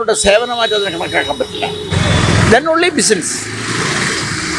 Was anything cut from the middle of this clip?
no; 0 cuts

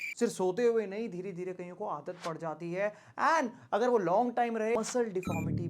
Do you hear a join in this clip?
yes; 1 cut; at 4.8 s

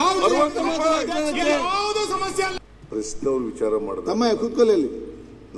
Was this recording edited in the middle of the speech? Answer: yes; 1 cut; at 2.5 s

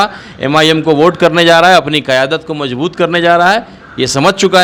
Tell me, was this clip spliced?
no; 0 cuts

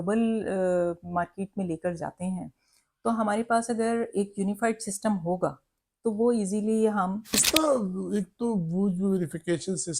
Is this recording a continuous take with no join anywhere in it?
no; 1 cut; at 7.4 s

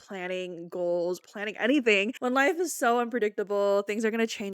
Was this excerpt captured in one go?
no; 2 cuts; at 1.2 s, 2.1 s

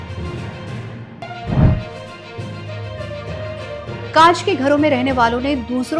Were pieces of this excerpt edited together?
yes; 1 cut; at 1.1 s

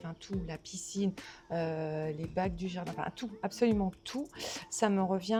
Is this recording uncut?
yes; 0 cuts

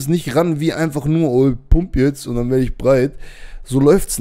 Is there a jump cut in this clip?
no; 0 cuts

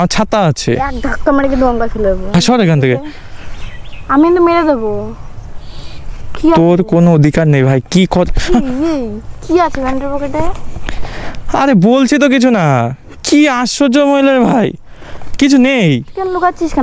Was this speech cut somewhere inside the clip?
yes; 1 cut; at 2.3 s

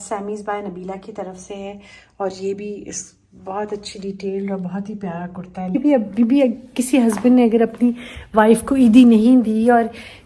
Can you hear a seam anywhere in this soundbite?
yes; 1 cut; at 5.8 s

